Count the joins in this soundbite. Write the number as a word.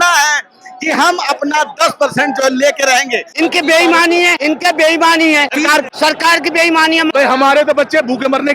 four